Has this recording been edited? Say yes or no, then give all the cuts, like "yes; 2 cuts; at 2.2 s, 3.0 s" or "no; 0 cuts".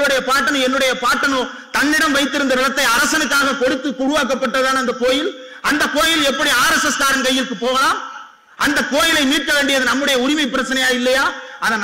no; 0 cuts